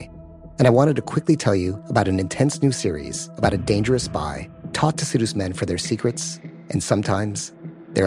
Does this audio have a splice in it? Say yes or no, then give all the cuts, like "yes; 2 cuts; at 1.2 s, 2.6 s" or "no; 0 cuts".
no; 0 cuts